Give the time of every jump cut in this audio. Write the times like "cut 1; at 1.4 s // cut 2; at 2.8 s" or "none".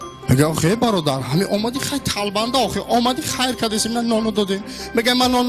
cut 1; at 2.6 s